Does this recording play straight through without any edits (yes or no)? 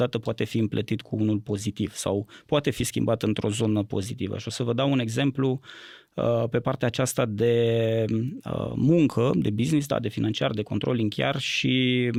yes